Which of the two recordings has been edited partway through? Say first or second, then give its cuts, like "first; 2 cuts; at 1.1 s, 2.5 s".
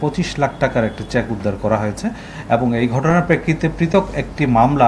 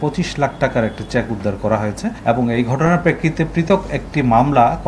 second; 1 cut; at 2.2 s